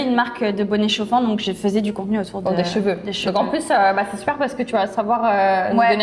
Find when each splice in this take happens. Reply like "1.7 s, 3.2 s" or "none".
none